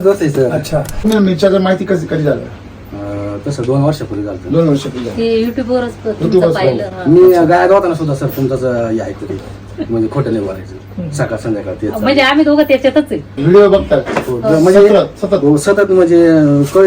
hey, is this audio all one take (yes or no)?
no